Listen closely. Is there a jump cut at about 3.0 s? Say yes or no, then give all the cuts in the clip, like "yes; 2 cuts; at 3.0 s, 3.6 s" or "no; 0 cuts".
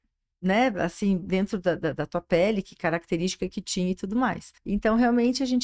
no; 1 cut; at 4.5 s